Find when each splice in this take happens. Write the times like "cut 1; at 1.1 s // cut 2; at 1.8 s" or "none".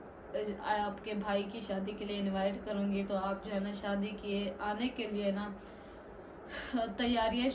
none